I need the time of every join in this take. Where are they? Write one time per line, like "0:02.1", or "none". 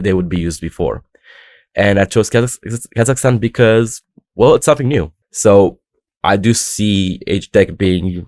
0:05.2